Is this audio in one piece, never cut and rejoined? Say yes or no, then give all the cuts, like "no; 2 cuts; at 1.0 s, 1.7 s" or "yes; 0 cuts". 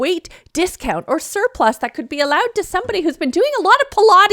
yes; 0 cuts